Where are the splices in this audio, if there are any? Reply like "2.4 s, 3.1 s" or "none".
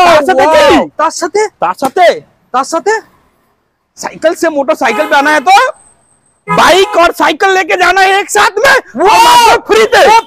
none